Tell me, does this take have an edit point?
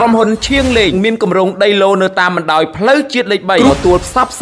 yes; 2 cuts; at 0.9 s, 3.7 s

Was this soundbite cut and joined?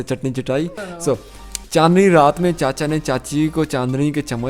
yes; 1 cut; at 1.1 s

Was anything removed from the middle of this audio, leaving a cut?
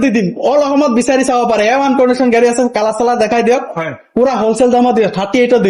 no; 0 cuts

